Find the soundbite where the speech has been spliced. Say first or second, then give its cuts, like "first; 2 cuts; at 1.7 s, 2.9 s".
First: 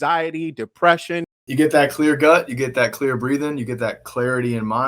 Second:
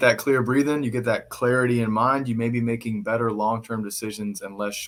first; 1 cut; at 1.4 s